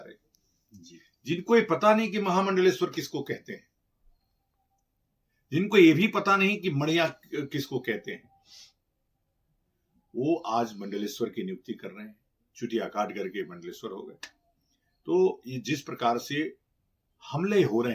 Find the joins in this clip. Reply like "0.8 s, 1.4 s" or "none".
none